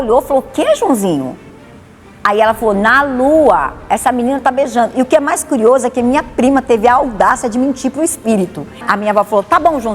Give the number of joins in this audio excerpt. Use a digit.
1